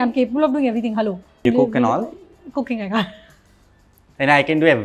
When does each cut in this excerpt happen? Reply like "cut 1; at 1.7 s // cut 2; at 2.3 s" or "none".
cut 1; at 1.5 s